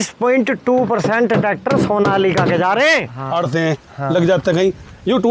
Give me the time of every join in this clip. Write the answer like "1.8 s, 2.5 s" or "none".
3.1 s